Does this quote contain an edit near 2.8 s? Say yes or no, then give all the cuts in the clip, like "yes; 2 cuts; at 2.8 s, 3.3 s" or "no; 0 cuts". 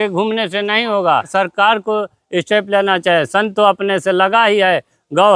no; 1 cut; at 1.3 s